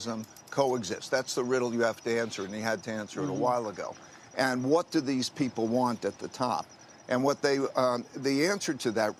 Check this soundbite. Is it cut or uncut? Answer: uncut